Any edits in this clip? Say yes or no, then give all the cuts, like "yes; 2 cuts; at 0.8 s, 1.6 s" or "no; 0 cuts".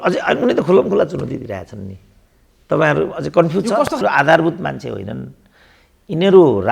yes; 1 cut; at 4.0 s